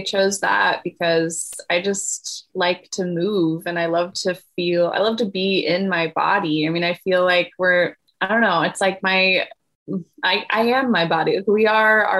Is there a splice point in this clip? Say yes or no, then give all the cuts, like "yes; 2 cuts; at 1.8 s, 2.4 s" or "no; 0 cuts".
yes; 1 cut; at 8.0 s